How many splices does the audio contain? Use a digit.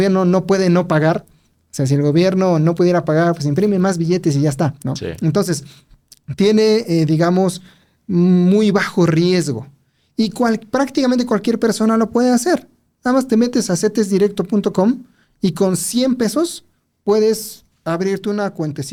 0